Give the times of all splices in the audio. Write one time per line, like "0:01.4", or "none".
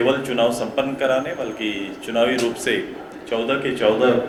none